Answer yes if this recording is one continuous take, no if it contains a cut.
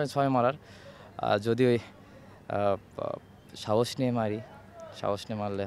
yes